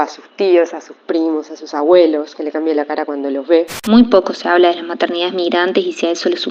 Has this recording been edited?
yes; 1 cut; at 3.8 s

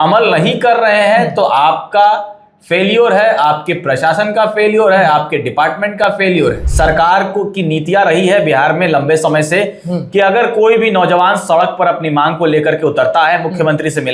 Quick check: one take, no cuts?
no; 1 cut; at 6.6 s

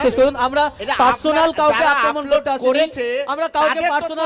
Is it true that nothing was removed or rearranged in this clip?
yes; 0 cuts

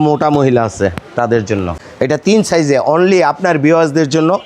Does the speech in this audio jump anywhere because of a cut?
yes; 1 cut; at 2.1 s

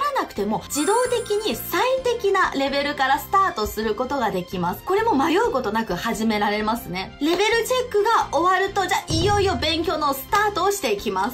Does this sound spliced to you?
no; 0 cuts

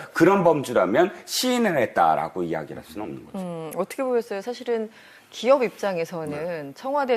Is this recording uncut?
no; 1 cut; at 5.5 s

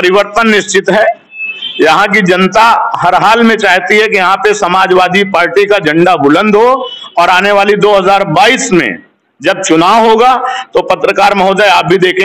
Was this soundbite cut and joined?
no; 0 cuts

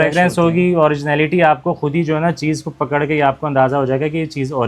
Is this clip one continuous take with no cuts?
yes; 0 cuts

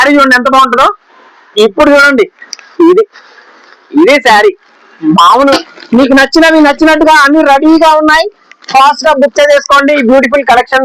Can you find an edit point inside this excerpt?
yes; 1 cut; at 5.6 s

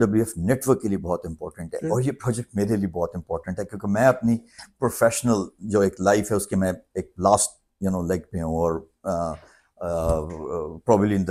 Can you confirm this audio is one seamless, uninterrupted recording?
yes; 0 cuts

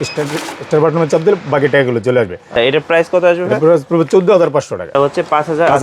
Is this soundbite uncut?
no; 2 cuts; at 2.5 s, 4.9 s

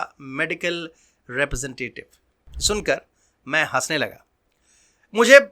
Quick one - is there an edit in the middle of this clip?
no; 0 cuts

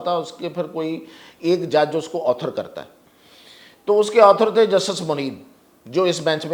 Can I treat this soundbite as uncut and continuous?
yes; 0 cuts

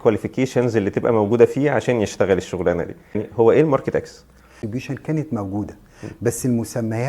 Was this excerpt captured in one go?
no; 2 cuts; at 3.2 s, 4.6 s

